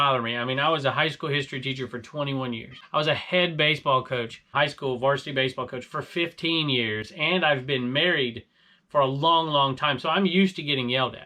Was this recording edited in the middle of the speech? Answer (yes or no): yes